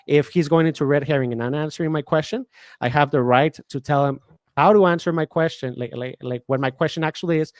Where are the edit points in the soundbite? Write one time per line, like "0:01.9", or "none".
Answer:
none